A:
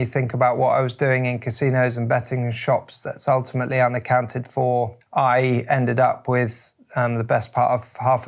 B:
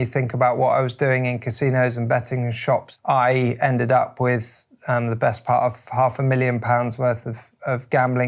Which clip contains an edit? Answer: B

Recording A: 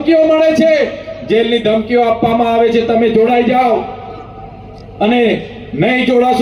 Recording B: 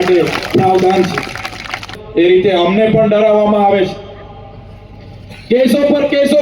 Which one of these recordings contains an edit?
B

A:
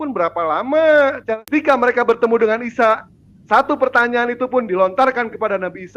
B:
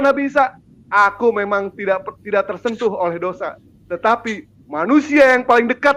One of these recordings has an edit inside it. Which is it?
A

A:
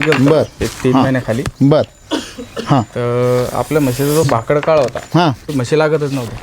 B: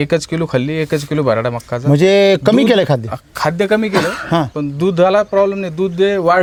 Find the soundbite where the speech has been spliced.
A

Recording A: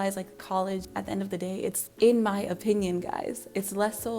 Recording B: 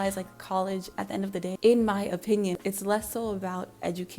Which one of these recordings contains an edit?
B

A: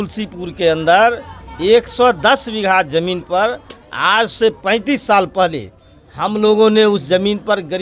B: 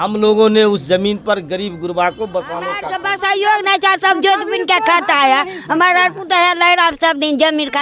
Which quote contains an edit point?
B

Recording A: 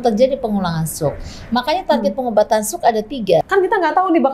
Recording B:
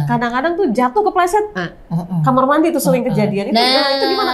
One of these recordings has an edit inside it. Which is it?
A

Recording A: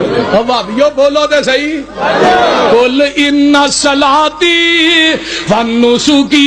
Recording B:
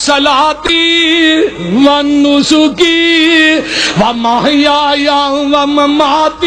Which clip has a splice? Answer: A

